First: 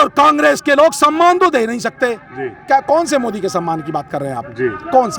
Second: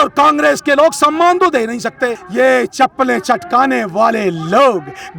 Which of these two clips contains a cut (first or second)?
second